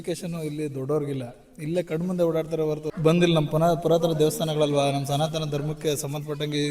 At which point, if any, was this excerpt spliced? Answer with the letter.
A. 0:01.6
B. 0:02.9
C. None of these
B